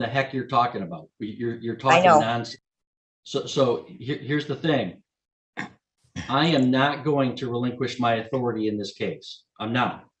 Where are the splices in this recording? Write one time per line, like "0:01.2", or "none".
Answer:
none